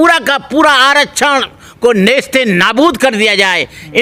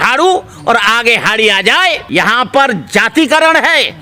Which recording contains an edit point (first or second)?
second